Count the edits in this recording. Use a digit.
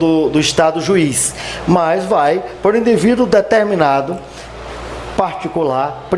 0